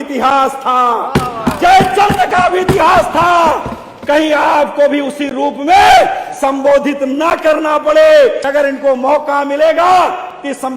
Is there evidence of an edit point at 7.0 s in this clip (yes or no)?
no